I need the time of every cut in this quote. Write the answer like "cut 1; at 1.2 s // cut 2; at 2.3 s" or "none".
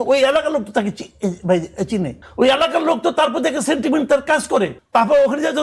cut 1; at 2.2 s // cut 2; at 4.8 s

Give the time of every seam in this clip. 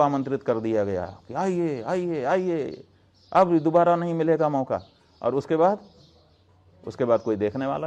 none

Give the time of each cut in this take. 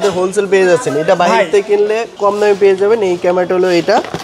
cut 1; at 2.1 s

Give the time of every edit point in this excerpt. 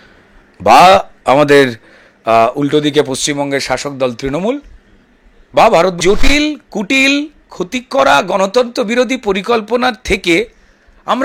cut 1; at 6.0 s

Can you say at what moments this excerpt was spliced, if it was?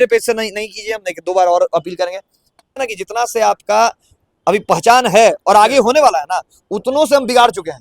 cut 1; at 2.8 s

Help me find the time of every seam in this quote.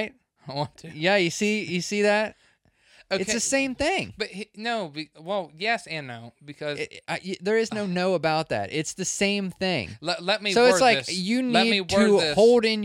none

